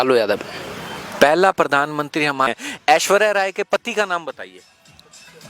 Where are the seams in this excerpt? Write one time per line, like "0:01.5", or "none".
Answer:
0:02.5